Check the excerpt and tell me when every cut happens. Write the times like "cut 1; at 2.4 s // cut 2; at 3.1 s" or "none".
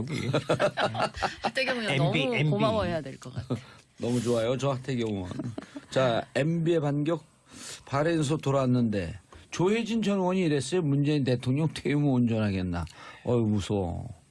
none